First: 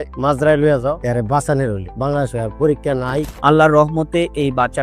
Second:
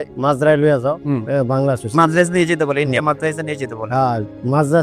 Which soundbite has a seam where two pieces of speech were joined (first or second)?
first